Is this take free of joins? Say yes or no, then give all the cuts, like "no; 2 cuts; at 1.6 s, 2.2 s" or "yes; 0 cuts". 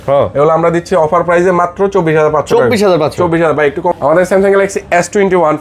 no; 1 cut; at 3.9 s